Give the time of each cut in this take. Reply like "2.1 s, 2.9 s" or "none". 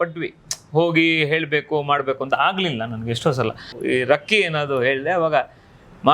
3.7 s